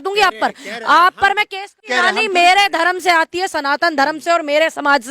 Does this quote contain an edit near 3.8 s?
no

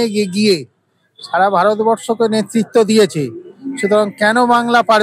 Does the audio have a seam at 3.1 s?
no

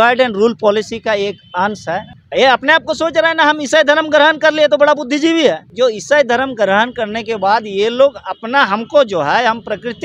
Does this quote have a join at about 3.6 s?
no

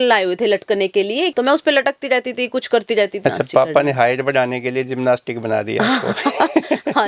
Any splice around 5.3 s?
no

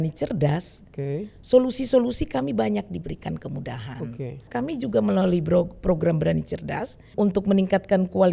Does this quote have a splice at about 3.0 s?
no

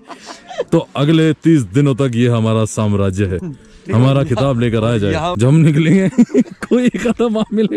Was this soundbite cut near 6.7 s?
no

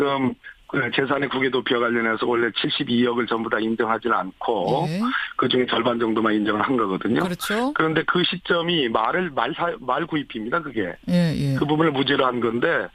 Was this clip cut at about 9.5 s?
yes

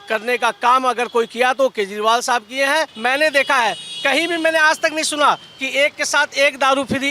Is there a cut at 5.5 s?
no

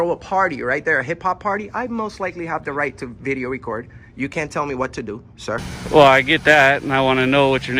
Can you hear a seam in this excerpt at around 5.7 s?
yes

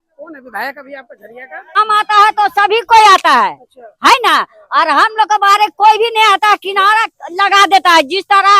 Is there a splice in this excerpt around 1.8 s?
yes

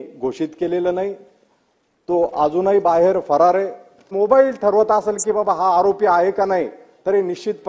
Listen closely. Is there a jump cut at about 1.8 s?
no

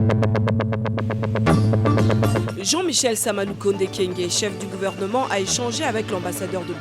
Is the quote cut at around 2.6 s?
yes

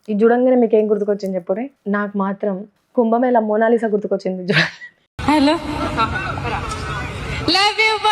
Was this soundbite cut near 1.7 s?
yes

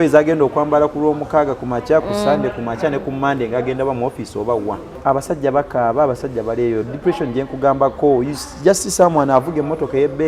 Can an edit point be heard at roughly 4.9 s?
yes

